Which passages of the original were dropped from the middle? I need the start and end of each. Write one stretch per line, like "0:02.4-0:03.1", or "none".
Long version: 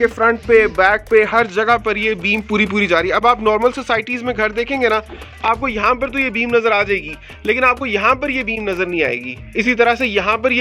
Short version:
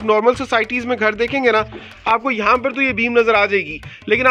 none